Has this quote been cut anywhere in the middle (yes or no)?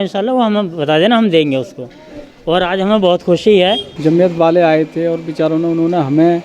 yes